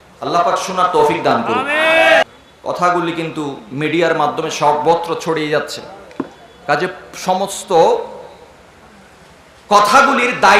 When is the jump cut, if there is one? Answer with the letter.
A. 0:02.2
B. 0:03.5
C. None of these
A